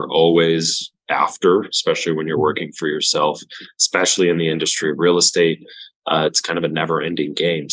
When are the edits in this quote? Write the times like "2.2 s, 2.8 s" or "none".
none